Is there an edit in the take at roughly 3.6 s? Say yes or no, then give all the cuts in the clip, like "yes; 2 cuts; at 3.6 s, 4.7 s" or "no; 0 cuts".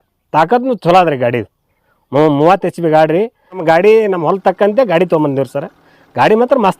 yes; 1 cut; at 3.6 s